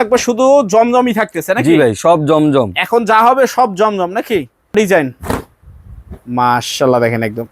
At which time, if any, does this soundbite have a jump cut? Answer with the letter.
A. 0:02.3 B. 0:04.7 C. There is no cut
B